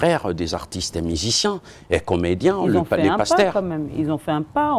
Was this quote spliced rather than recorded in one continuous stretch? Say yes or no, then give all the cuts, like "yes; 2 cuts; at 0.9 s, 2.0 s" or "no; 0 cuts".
no; 0 cuts